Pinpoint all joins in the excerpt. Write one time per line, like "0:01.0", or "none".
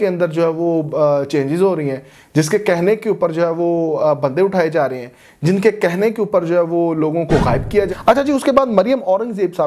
0:07.9